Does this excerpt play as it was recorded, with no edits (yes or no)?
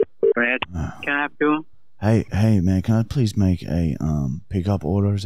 yes